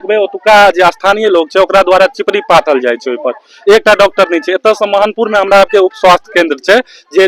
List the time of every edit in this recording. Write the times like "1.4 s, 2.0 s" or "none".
none